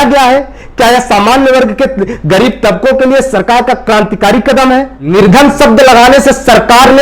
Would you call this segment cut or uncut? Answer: cut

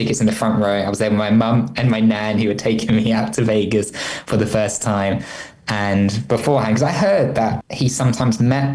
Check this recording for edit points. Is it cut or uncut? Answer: cut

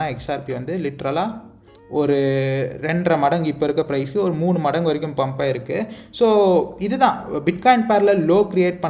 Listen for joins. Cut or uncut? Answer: uncut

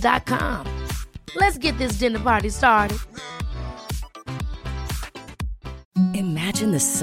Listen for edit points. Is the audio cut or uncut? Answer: uncut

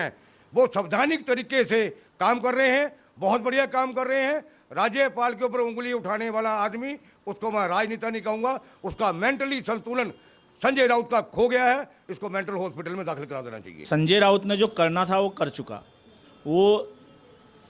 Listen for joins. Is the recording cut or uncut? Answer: cut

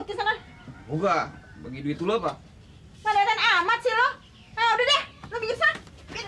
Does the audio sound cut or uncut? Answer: uncut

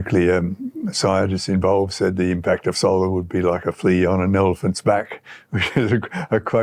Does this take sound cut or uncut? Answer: uncut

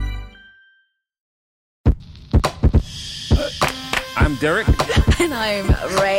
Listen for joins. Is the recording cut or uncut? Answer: cut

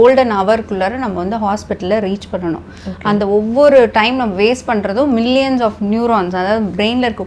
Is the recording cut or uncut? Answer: uncut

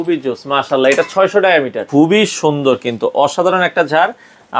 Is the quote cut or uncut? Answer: cut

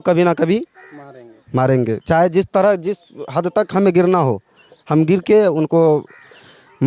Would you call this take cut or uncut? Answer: uncut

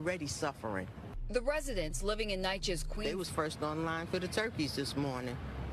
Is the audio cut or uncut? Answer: cut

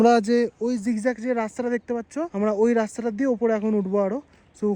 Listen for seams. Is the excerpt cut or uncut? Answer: cut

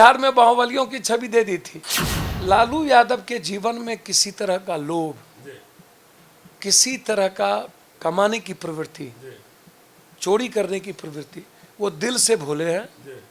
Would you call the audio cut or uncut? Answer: cut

